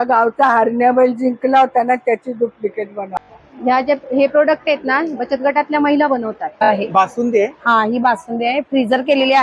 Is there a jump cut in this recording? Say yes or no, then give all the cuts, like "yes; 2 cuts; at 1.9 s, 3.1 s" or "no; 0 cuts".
yes; 2 cuts; at 3.2 s, 6.7 s